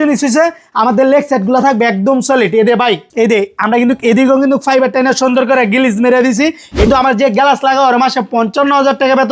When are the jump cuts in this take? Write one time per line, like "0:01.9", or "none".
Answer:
0:02.8
0:06.9

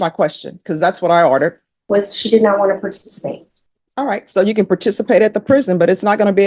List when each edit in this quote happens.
0:01.7

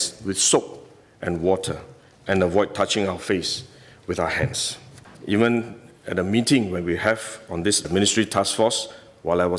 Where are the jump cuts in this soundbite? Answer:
0:05.1

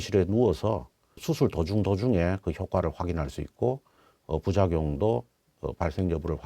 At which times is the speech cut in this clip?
0:01.1

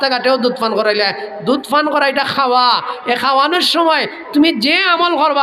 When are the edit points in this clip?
none

